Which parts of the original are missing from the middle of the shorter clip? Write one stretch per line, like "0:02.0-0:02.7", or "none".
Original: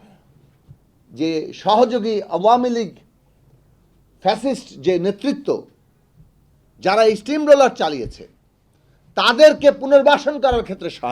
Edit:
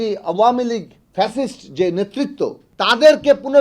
0:03.0-0:04.0
0:05.7-0:09.0